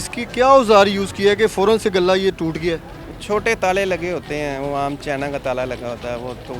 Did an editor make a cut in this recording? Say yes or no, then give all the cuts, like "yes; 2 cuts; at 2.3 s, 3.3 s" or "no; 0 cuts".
no; 0 cuts